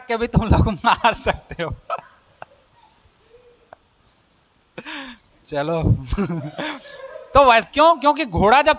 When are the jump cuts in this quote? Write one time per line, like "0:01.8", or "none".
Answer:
0:07.6